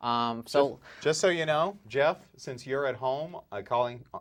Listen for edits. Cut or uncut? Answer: uncut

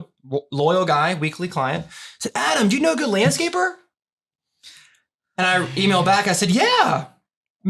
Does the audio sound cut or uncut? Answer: uncut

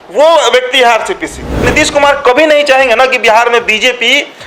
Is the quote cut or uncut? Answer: cut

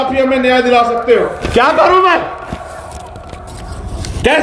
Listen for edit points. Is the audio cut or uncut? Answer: cut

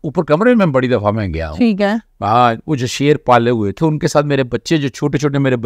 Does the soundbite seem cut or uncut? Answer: uncut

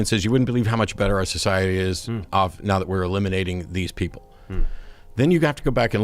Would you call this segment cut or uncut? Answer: uncut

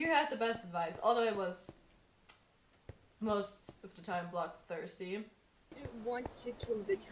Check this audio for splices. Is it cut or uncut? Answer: cut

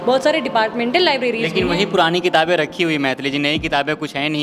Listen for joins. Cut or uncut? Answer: uncut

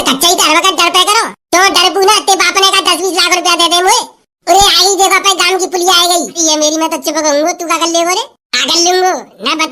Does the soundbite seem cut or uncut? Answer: cut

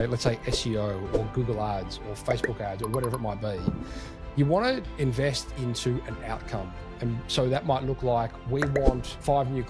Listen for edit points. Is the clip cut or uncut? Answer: uncut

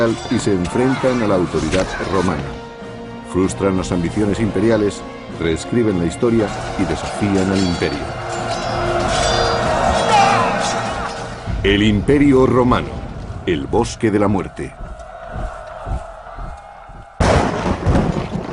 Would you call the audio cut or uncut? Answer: cut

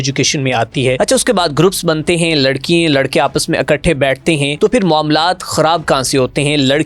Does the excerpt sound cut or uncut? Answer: cut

